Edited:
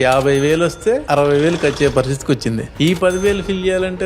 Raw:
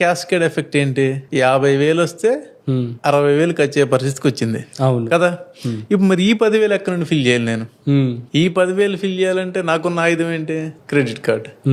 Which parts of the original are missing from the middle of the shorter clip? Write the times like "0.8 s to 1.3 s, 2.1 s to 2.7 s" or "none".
2.4 s to 3.0 s, 4.6 s to 8.2 s